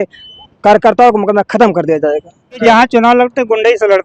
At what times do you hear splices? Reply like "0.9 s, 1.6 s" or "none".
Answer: 2.6 s